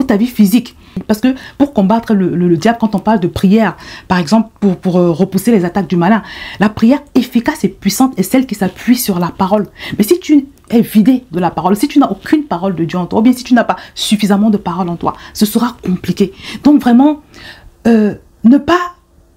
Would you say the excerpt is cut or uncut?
cut